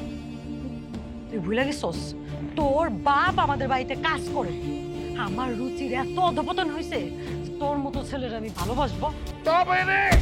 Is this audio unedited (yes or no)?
no